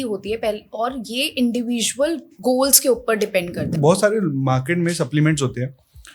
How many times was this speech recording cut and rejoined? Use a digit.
2